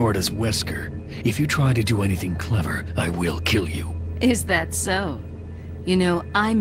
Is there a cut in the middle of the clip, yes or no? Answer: no